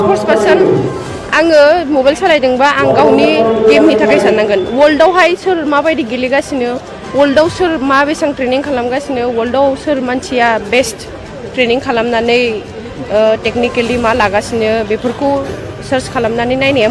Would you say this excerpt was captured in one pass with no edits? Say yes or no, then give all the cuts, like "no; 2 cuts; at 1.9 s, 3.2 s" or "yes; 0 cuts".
yes; 0 cuts